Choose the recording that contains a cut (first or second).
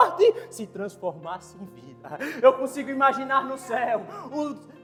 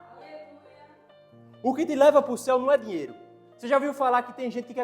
second